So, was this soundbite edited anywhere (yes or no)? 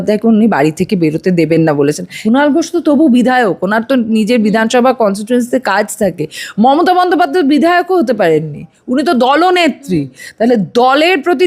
yes